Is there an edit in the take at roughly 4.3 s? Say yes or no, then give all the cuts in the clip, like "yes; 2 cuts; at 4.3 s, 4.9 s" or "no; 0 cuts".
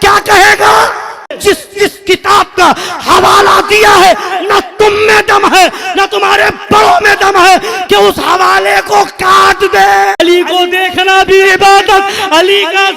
no; 2 cuts; at 1.3 s, 10.2 s